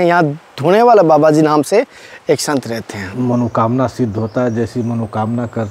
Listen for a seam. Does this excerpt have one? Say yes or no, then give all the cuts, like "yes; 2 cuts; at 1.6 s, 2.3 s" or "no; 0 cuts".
yes; 1 cut; at 3.0 s